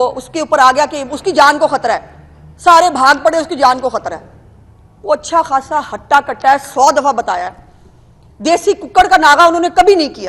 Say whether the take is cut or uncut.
uncut